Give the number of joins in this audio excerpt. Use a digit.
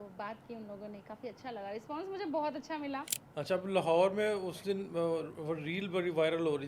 1